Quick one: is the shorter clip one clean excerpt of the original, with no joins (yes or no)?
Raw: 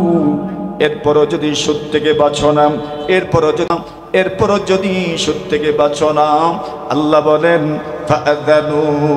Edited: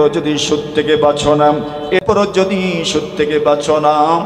no